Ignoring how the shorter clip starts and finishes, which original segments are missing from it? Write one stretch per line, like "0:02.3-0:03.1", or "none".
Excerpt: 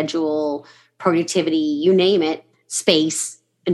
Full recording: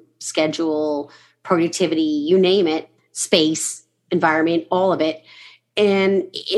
none